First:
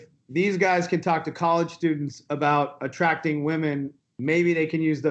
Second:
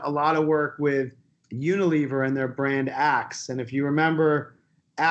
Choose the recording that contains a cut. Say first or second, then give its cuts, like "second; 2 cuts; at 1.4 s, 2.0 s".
first; 1 cut; at 3.9 s